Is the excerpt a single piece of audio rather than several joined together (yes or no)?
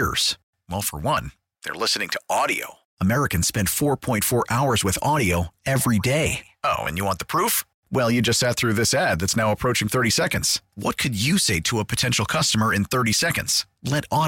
yes